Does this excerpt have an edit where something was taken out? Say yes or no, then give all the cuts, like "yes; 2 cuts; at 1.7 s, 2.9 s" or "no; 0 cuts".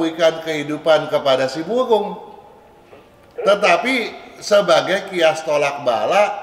no; 0 cuts